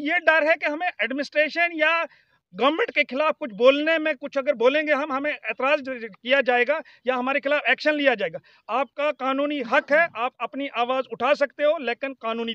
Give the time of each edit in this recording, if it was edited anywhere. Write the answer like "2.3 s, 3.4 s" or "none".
none